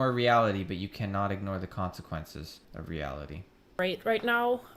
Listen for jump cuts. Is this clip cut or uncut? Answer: cut